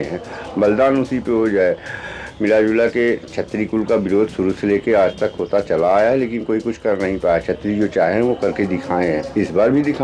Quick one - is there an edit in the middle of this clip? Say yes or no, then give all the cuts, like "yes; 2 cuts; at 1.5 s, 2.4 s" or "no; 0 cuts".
no; 0 cuts